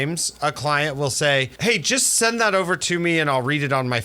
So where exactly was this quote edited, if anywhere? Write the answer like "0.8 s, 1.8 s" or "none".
1.5 s